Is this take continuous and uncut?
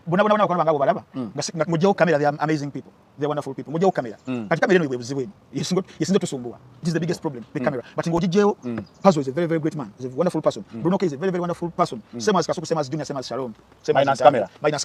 yes; 0 cuts

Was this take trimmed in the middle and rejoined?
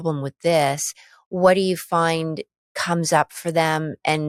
no; 0 cuts

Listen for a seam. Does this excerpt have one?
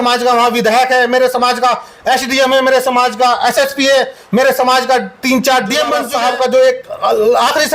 yes; 1 cut; at 6.1 s

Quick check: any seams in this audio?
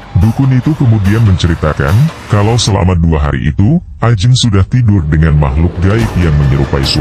no; 0 cuts

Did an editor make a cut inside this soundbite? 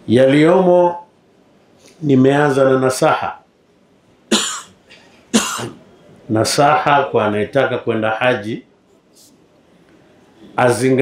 no; 0 cuts

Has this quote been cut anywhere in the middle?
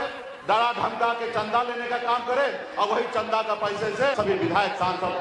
yes; 1 cut; at 4.1 s

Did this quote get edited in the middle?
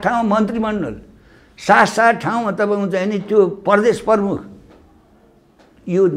no; 0 cuts

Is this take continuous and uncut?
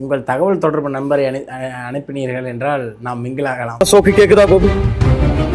no; 1 cut; at 3.8 s

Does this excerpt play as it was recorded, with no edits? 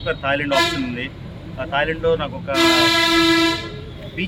yes; 0 cuts

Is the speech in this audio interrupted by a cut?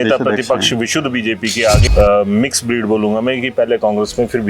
yes; 1 cut; at 1.8 s

